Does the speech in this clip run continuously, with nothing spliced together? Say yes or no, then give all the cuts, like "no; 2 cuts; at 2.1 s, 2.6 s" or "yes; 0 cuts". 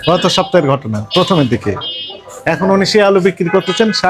yes; 0 cuts